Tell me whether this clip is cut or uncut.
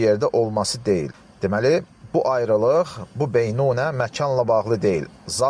cut